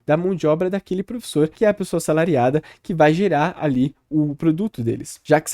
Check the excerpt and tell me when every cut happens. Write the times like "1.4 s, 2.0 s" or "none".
1.5 s